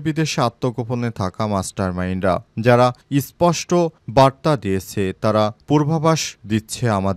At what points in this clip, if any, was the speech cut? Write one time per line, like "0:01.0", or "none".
none